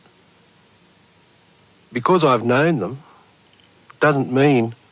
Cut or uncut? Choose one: uncut